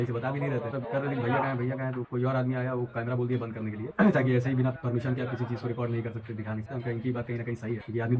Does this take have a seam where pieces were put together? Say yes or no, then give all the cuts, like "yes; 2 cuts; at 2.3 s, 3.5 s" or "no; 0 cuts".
no; 0 cuts